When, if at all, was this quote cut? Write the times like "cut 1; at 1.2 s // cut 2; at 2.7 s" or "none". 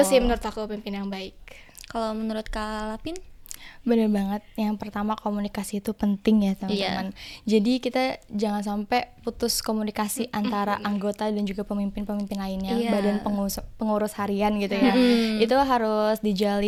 none